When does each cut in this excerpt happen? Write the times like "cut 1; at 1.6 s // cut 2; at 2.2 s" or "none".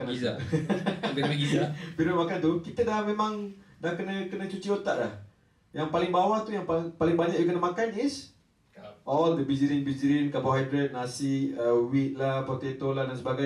none